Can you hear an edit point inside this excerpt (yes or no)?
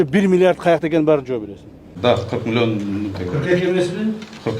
yes